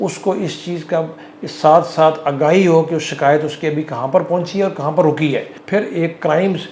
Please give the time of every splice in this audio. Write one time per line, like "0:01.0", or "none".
0:05.5